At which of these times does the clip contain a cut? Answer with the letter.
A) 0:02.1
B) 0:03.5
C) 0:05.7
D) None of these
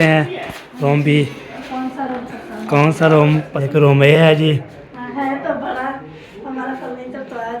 B